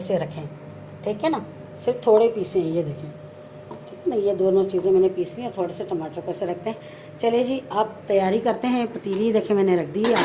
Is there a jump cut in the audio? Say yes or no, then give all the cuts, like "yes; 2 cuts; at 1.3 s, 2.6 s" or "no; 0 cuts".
no; 0 cuts